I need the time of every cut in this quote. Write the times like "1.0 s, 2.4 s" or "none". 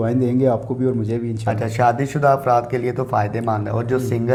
none